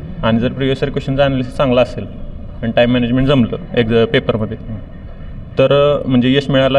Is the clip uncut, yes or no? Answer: yes